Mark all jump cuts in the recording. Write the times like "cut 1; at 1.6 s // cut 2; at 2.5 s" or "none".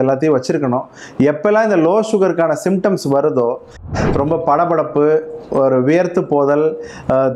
cut 1; at 3.9 s